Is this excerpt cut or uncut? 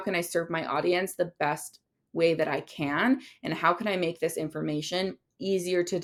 uncut